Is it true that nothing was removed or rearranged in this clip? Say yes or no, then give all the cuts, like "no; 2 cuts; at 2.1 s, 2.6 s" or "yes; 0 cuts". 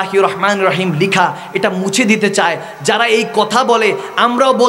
yes; 0 cuts